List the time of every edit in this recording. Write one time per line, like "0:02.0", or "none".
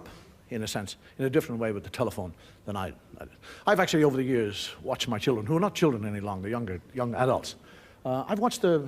0:07.3